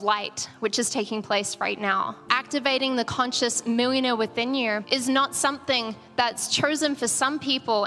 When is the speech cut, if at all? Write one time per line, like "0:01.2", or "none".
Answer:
0:02.2
0:04.8